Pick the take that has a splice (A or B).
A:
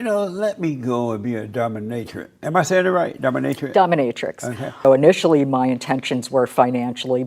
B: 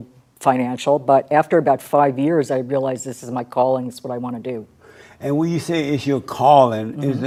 A